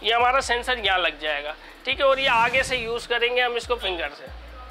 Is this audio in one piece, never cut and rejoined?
yes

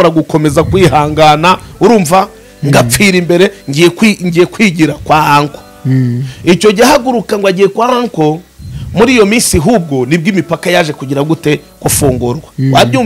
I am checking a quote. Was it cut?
no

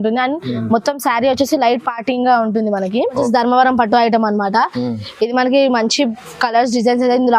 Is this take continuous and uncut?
no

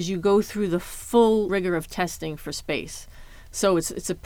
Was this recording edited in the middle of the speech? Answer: yes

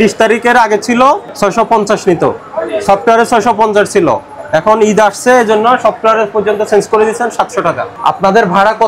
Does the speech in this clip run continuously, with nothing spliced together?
no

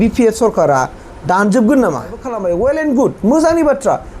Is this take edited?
yes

